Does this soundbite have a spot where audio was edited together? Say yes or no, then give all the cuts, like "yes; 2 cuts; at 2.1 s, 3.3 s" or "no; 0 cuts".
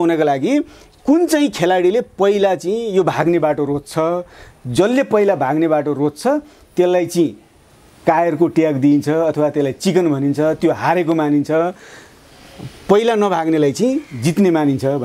no; 0 cuts